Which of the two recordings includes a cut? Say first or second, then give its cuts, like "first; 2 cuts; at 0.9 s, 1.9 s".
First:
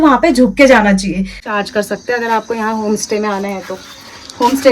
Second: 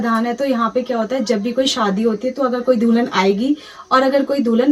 first; 1 cut; at 1.4 s